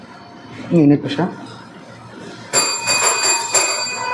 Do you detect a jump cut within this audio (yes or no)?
no